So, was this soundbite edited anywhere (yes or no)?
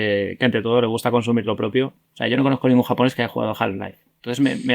yes